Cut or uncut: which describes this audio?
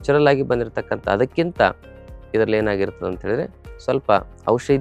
uncut